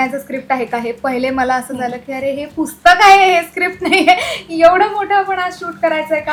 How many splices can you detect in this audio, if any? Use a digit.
0